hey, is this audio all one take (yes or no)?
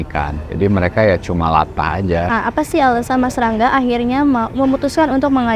no